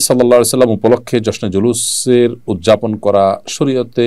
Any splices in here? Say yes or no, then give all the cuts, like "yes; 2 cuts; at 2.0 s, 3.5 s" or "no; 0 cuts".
no; 0 cuts